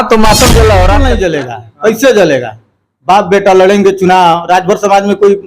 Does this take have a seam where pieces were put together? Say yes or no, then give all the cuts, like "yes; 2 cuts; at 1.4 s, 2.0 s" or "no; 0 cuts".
yes; 1 cut; at 1.1 s